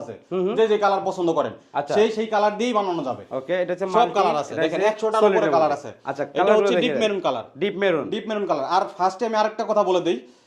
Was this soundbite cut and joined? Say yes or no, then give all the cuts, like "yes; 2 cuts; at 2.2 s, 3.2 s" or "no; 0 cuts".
no; 0 cuts